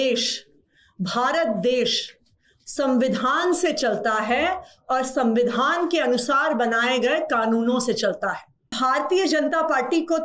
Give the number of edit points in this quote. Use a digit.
1